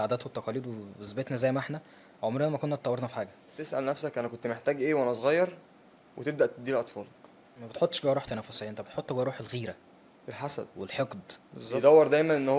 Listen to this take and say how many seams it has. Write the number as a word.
three